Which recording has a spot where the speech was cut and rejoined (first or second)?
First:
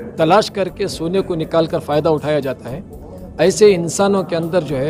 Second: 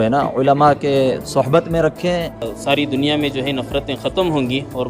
second